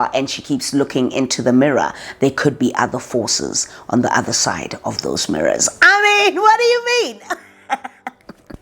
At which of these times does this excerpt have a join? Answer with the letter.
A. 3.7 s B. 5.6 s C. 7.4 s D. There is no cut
D